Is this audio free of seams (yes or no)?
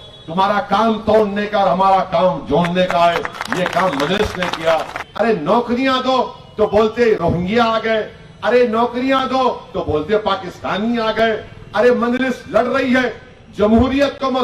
no